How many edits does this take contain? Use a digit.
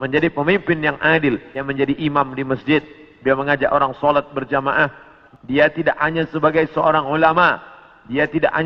1